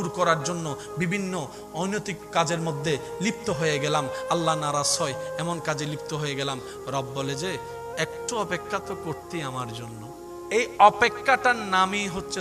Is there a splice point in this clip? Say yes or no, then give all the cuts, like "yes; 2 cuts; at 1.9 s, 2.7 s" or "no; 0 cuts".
yes; 1 cut; at 10.3 s